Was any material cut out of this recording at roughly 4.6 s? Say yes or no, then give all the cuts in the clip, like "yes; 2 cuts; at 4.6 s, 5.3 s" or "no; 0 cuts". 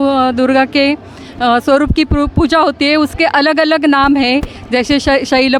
no; 0 cuts